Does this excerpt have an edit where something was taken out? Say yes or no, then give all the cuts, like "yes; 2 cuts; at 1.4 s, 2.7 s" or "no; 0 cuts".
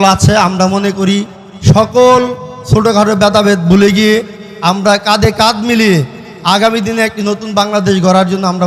no; 0 cuts